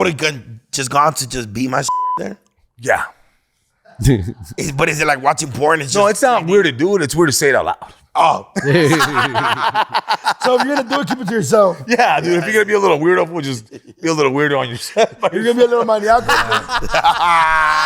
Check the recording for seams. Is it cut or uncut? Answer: uncut